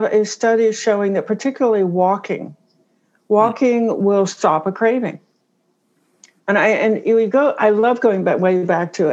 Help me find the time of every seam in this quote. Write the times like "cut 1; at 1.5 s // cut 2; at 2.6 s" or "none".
none